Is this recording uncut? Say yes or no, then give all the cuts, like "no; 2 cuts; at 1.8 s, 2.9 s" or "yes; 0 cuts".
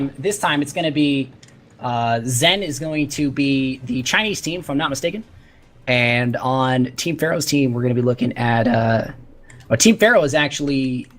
yes; 0 cuts